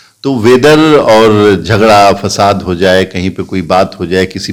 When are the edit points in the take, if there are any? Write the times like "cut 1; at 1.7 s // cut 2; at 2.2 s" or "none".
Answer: none

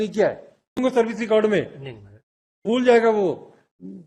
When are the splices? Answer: cut 1; at 0.8 s // cut 2; at 2.7 s

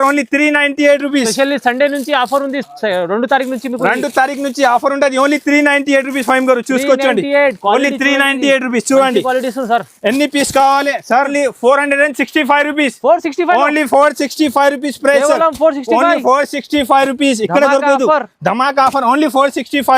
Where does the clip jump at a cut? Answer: cut 1; at 11.3 s

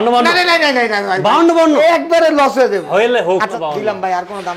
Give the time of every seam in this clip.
cut 1; at 3.5 s

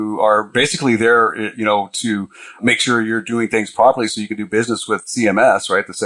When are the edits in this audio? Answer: cut 1; at 2.6 s // cut 2; at 5.0 s

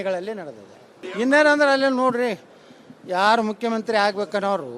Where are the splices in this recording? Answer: cut 1; at 1.0 s

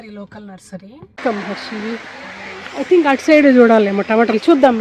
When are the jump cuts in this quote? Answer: cut 1; at 1.1 s

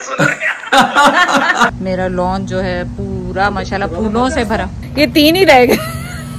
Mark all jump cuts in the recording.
cut 1; at 1.8 s // cut 2; at 4.8 s

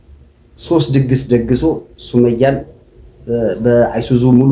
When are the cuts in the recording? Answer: none

